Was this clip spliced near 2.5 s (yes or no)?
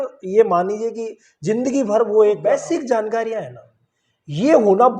yes